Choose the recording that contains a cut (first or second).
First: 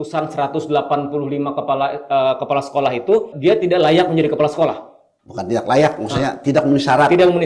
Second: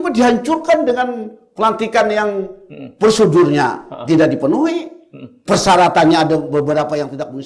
first